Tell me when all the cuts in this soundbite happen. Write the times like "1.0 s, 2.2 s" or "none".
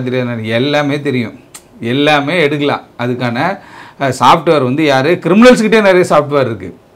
none

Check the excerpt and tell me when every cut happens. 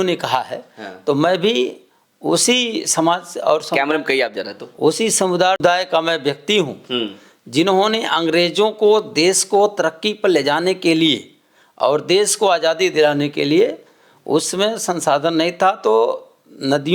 5.6 s

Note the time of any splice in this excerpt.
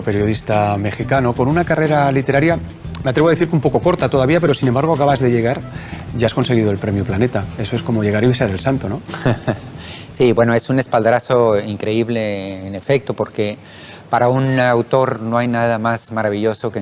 none

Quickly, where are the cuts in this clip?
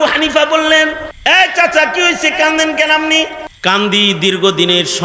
1.1 s, 3.5 s

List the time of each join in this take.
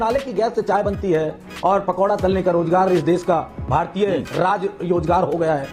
none

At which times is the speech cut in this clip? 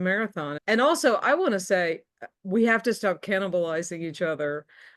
none

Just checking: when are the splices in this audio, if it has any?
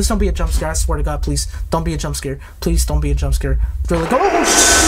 none

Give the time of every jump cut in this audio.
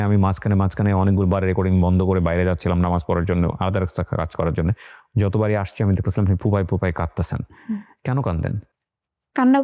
none

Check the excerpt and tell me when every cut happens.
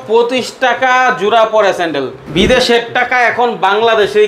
2.2 s

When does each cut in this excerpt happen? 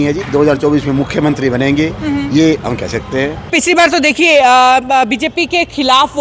3.5 s

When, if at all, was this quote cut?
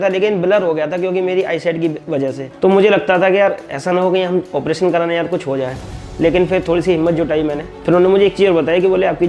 2.4 s, 7.7 s

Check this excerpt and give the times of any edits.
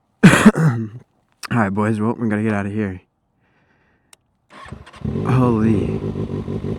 none

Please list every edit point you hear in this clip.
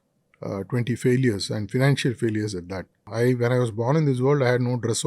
3.0 s

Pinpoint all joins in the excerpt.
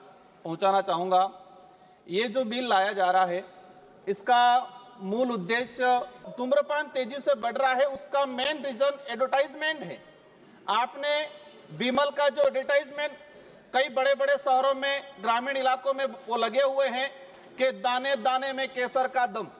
6.3 s

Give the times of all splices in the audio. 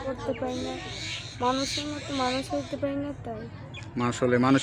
none

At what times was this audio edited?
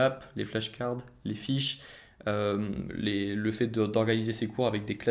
none

